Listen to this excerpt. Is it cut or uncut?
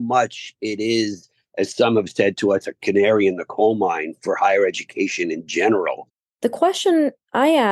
cut